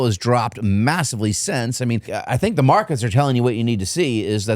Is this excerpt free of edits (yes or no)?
no